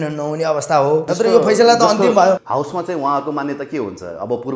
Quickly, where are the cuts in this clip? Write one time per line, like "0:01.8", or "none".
0:01.1
0:02.4

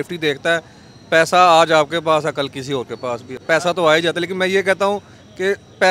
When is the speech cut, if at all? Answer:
none

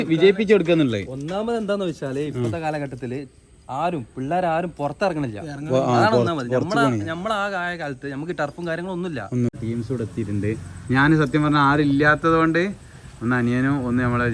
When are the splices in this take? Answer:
0:09.5

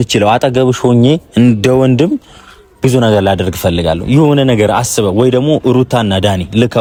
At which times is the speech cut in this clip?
none

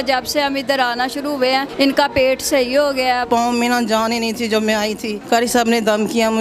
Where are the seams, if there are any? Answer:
0:01.7
0:03.2
0:05.1

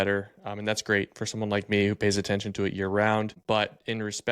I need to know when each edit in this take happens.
0:03.4

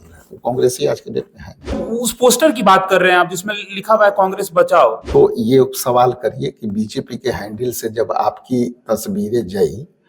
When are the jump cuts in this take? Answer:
0:01.8
0:05.0

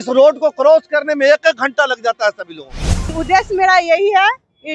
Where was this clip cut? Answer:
0:03.1

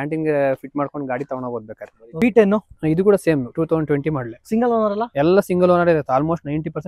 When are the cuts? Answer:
0:02.0

